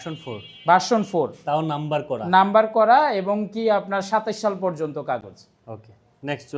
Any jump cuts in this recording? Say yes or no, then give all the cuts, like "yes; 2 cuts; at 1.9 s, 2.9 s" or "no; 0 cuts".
no; 0 cuts